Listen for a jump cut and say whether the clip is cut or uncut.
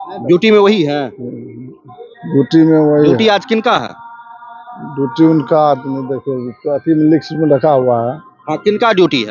uncut